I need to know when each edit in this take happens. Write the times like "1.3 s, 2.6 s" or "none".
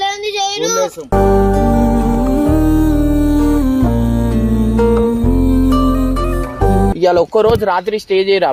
1.0 s, 6.9 s